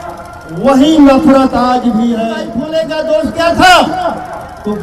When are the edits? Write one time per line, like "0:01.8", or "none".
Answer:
0:02.5